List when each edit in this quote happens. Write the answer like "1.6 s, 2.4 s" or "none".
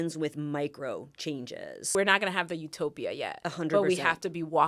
1.9 s